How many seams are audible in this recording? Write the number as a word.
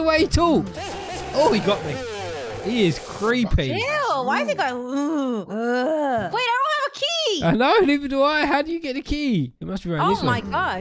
zero